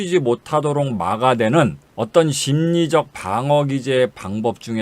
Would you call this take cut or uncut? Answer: cut